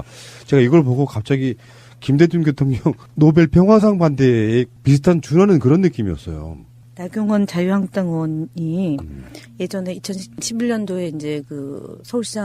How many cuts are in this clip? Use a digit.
1